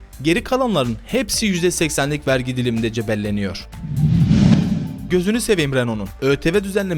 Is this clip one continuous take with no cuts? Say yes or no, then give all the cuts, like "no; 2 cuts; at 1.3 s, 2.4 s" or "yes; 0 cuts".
no; 2 cuts; at 3.8 s, 4.9 s